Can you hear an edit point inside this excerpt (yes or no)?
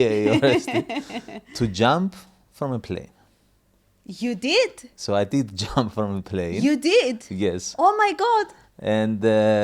no